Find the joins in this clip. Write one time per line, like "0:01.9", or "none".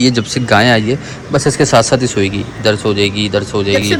none